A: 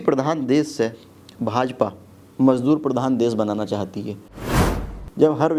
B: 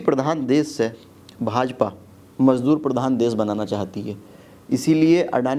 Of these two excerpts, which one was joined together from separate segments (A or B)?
A